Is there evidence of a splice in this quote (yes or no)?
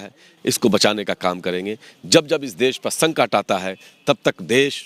no